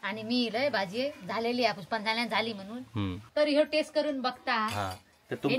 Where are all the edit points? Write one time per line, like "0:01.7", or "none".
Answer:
0:03.3